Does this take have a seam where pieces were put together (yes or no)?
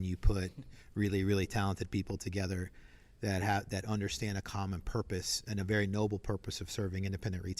no